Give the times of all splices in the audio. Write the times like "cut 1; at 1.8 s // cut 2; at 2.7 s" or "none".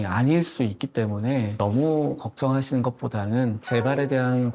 cut 1; at 1.5 s // cut 2; at 3.6 s